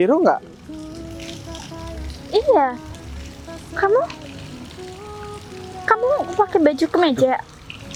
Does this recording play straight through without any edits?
yes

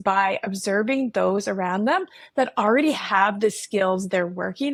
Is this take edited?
no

